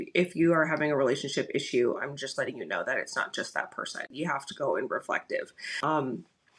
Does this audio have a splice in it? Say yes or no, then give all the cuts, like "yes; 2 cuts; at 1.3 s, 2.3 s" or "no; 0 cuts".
yes; 2 cuts; at 4.1 s, 5.6 s